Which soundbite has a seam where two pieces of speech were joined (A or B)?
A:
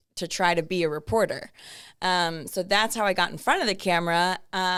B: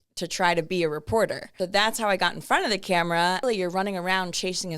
B